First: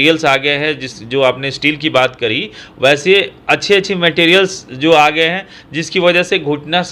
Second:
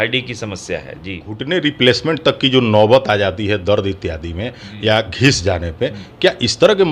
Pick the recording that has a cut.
second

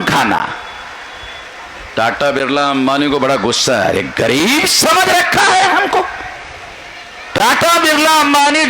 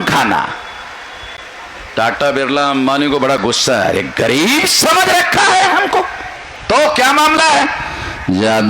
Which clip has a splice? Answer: second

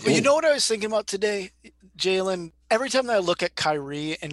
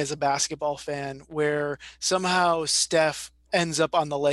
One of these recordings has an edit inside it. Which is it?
first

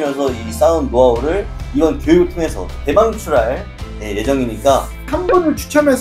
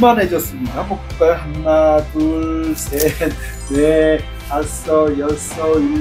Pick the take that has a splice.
first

